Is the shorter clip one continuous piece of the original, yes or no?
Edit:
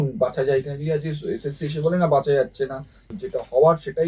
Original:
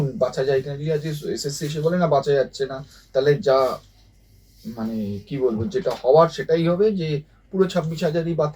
no